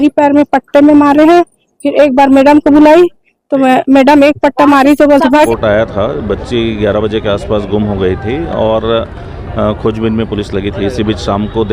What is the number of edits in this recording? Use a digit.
1